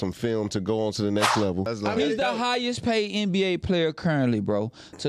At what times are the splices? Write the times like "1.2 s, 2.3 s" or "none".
1.7 s

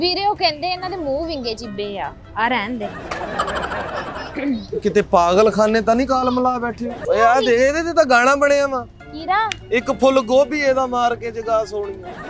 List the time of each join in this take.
7.0 s

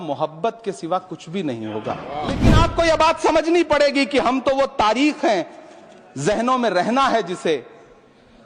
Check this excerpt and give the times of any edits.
2.5 s

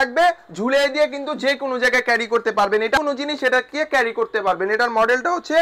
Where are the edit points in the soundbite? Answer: 3.0 s

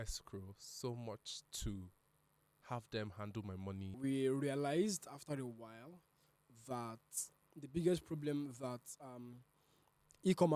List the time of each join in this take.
4.0 s, 7.4 s

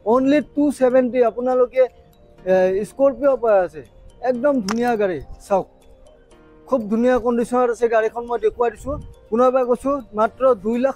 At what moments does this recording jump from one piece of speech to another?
none

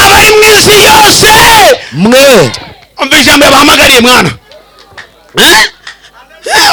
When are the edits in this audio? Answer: none

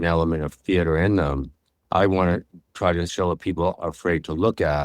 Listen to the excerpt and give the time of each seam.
1.8 s, 3.1 s

